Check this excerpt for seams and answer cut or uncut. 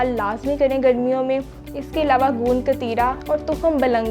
cut